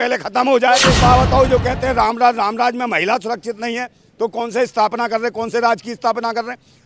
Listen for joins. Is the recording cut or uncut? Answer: cut